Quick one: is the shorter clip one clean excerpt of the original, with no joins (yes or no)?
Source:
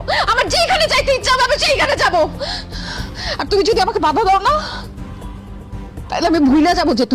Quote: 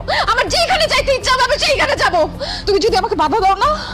no